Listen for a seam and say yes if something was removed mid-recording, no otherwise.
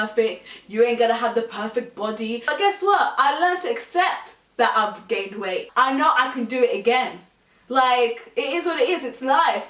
yes